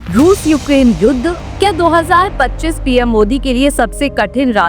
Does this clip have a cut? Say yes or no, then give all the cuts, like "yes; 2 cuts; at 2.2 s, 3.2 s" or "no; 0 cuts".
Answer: yes; 1 cut; at 1.4 s